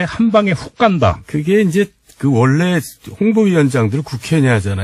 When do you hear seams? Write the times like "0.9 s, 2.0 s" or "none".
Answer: 2.6 s